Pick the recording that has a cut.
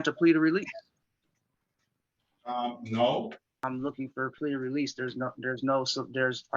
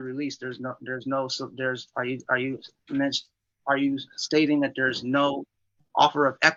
first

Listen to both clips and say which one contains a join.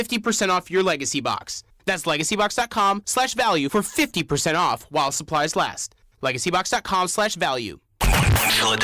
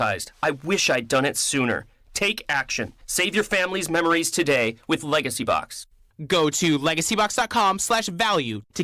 first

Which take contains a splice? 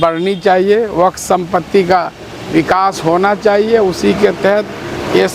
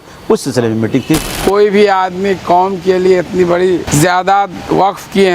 second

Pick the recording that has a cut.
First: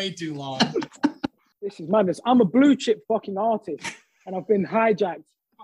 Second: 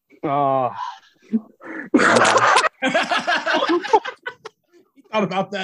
first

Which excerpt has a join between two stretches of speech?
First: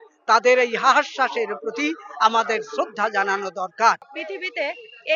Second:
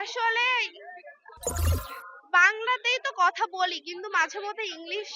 first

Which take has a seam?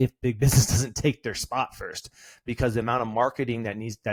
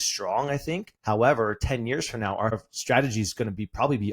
second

